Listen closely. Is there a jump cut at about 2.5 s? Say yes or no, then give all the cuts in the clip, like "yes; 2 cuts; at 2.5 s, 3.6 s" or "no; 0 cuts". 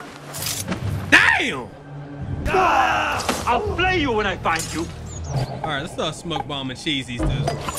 yes; 1 cut; at 2.5 s